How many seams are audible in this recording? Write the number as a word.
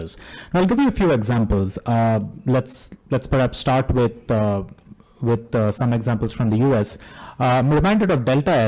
zero